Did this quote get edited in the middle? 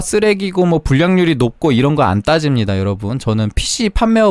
no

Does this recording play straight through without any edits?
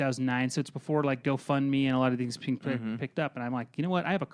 yes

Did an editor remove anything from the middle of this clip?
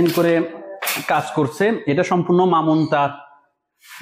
no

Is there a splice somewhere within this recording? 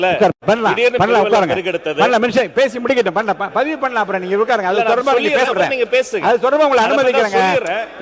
no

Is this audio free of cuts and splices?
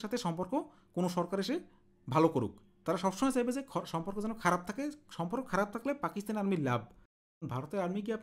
no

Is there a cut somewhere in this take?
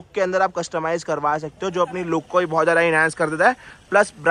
no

